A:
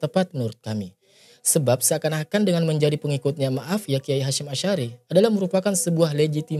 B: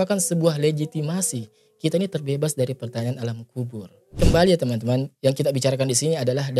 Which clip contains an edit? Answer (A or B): B